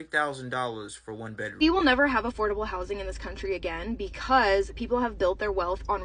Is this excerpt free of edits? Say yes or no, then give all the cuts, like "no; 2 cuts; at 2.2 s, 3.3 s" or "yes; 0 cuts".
no; 1 cut; at 1.4 s